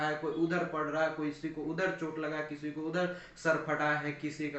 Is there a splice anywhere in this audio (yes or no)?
no